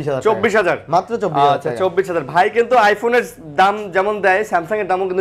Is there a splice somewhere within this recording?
no; 0 cuts

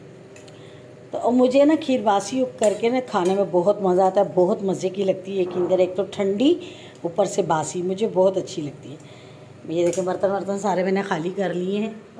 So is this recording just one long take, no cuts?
yes; 0 cuts

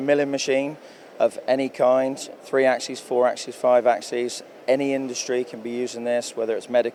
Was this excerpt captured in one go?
yes; 0 cuts

